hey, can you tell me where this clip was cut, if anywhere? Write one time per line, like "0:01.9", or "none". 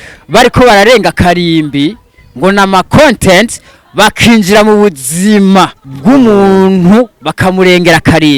0:05.8
0:07.2